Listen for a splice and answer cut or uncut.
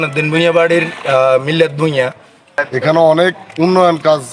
cut